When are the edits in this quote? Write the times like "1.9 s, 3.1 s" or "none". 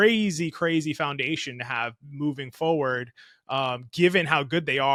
none